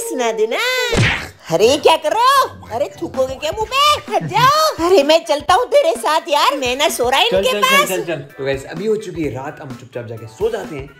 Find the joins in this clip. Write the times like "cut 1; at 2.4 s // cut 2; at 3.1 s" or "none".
none